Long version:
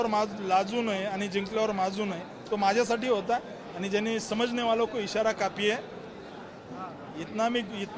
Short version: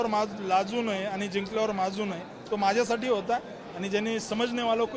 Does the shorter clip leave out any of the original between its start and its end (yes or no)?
no